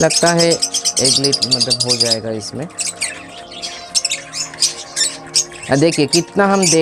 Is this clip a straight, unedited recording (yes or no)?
yes